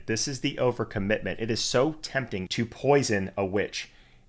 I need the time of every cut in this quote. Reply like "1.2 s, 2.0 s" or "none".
2.4 s